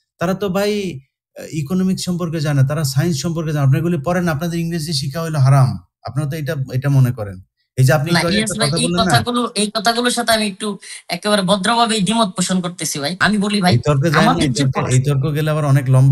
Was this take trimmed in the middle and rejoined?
yes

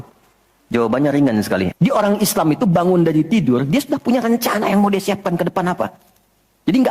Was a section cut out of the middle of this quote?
yes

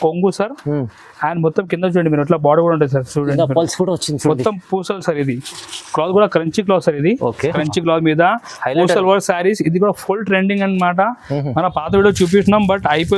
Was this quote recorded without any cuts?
no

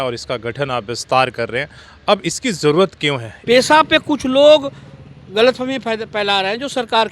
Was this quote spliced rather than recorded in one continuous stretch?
yes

